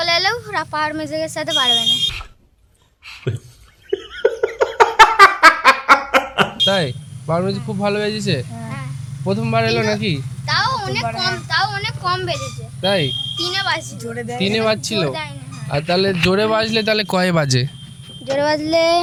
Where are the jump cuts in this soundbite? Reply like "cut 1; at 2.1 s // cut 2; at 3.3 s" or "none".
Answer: none